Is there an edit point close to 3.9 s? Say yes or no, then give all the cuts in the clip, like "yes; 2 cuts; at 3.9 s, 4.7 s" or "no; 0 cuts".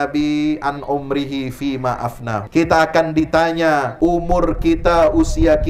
yes; 2 cuts; at 2.4 s, 3.9 s